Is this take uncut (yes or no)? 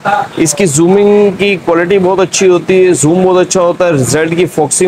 yes